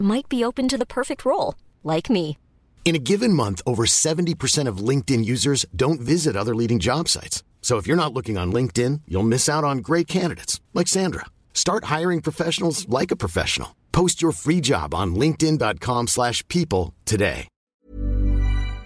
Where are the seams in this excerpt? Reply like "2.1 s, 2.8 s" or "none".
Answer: 17.7 s